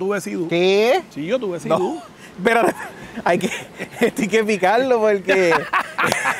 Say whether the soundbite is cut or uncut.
uncut